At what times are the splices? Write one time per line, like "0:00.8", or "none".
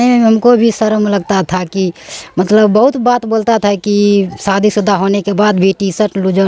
none